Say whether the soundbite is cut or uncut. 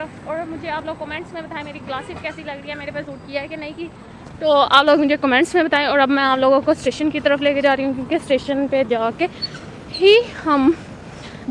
uncut